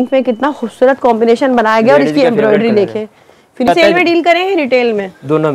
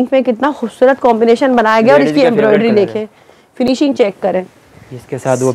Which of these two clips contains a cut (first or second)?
first